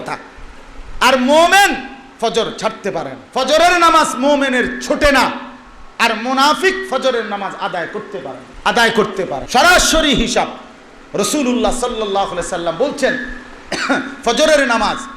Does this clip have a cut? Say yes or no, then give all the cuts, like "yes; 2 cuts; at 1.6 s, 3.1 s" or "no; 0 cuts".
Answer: yes; 3 cuts; at 3.2 s, 8.4 s, 9.4 s